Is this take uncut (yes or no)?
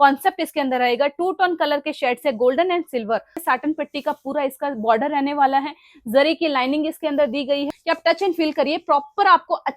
no